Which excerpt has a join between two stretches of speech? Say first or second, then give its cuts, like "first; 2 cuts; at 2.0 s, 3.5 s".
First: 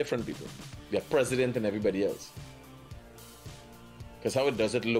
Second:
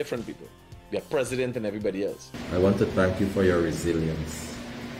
second; 1 cut; at 2.3 s